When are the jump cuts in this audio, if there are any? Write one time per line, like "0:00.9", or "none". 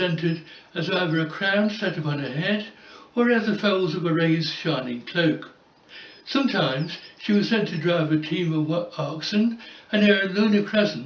0:08.1